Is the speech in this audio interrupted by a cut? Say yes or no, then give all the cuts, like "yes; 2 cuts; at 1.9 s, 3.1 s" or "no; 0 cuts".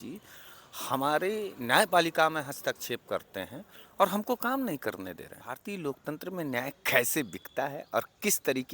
yes; 1 cut; at 5.5 s